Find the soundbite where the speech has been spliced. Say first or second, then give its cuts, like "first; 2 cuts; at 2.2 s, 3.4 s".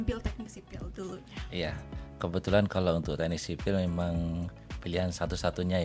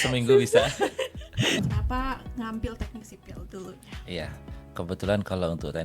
second; 1 cut; at 1.6 s